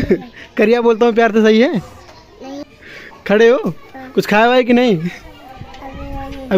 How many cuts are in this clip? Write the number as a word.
one